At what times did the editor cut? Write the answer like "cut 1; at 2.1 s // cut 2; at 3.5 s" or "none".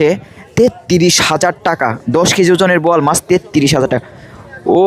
none